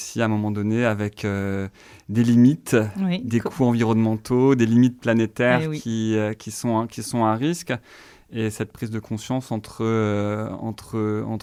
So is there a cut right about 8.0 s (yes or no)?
no